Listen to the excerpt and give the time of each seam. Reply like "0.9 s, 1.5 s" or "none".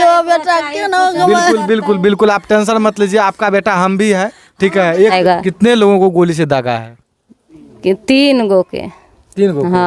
5.1 s